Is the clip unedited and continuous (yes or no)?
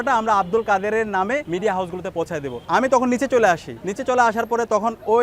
yes